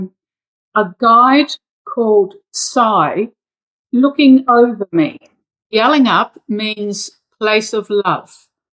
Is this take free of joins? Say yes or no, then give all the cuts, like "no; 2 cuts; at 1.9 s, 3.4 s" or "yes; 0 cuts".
no; 1 cut; at 5.7 s